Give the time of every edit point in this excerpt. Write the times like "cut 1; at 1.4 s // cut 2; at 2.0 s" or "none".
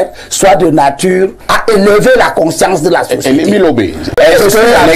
cut 1; at 1.4 s // cut 2; at 4.2 s